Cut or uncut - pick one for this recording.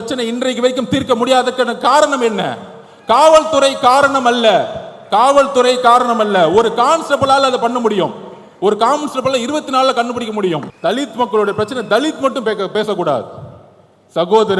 cut